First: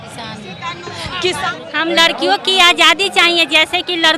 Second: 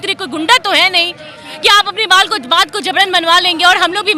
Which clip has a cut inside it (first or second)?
first